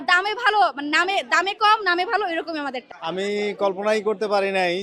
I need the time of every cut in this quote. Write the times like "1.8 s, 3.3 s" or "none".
2.9 s